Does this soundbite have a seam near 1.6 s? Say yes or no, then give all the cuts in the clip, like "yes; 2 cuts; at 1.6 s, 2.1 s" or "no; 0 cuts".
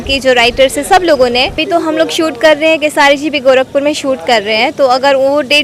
yes; 1 cut; at 1.6 s